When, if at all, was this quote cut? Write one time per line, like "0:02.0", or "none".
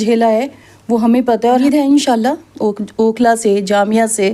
0:01.6